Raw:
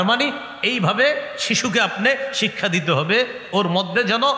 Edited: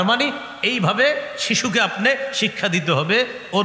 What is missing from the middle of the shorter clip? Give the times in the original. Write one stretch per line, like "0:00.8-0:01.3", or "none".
none